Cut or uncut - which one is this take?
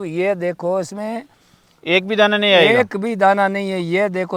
uncut